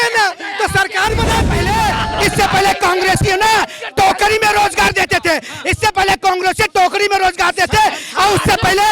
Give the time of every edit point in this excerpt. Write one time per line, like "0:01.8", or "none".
0:01.5